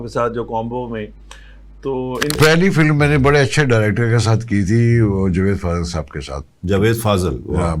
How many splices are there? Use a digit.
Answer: 1